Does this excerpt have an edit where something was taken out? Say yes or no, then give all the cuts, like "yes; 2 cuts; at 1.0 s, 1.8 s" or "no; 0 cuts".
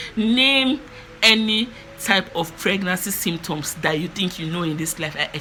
no; 0 cuts